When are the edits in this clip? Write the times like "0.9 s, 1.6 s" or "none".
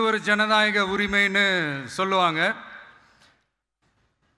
none